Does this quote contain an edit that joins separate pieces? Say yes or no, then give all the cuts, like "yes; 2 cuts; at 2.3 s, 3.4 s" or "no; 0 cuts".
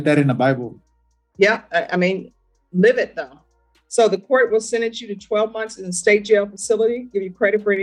no; 0 cuts